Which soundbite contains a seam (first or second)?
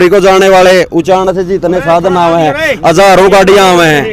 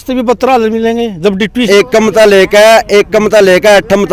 second